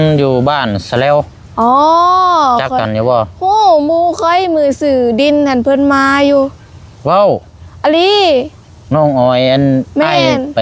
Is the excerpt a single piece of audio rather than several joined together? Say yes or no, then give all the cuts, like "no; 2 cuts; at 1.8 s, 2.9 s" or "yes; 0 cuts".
yes; 0 cuts